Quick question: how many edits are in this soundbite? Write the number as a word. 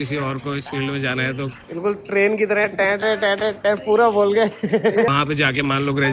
two